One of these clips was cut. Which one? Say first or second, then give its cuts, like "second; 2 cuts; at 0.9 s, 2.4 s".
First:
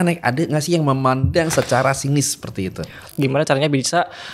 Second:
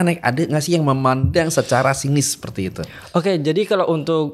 first; 1 cut; at 3.0 s